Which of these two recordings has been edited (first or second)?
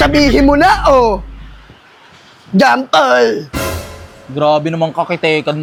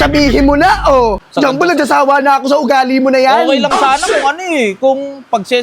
second